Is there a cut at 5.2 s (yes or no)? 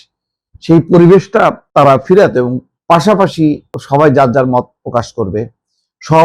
no